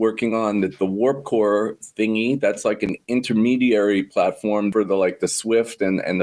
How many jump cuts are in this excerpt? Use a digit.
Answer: 1